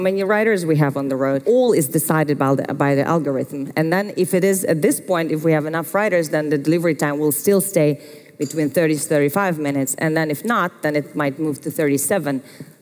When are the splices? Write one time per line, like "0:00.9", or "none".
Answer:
0:01.4

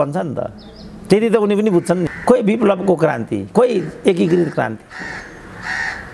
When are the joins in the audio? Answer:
0:02.1

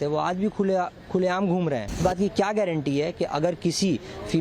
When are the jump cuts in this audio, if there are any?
0:02.0

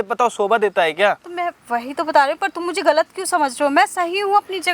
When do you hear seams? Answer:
none

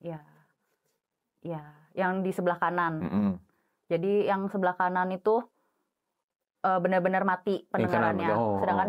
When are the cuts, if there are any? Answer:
none

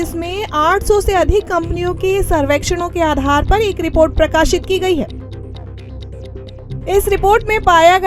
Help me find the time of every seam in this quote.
none

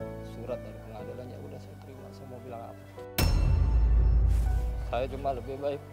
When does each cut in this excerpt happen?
0:04.7

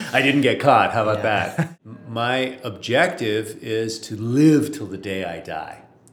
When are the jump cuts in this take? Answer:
0:01.7

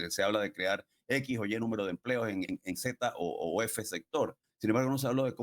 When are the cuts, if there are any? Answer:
0:02.5
0:04.5

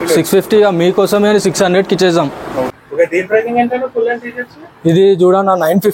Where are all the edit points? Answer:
0:02.8

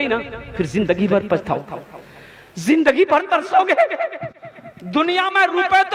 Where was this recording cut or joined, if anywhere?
none

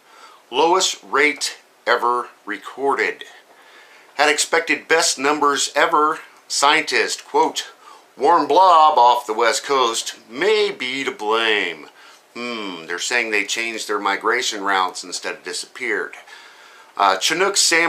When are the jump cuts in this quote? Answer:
none

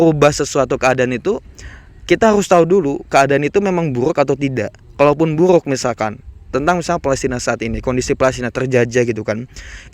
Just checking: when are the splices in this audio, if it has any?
none

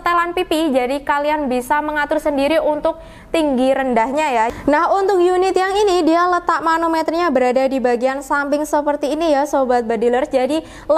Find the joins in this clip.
0:04.5

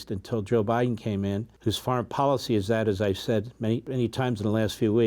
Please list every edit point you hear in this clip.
0:01.5
0:03.9

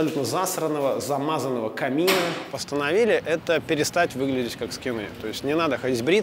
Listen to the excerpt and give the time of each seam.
0:02.5

